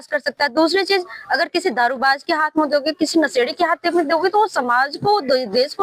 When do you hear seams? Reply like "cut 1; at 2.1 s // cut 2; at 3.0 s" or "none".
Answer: none